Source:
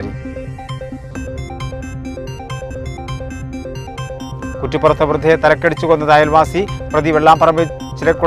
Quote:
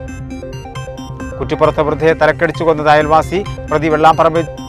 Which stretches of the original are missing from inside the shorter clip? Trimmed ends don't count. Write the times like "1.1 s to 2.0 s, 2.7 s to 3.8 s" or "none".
2.7 s to 4.1 s